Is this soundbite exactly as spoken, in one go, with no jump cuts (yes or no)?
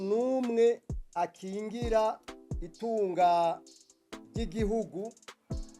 yes